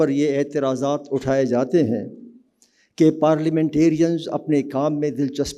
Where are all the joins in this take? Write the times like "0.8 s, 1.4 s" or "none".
none